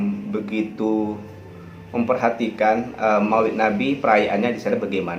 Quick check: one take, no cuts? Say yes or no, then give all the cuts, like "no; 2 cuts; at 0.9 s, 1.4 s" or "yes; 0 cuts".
yes; 0 cuts